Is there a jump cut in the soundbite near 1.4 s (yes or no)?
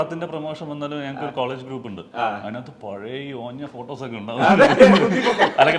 no